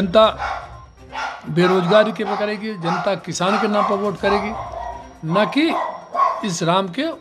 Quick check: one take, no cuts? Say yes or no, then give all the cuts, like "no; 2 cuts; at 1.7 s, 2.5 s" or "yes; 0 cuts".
yes; 0 cuts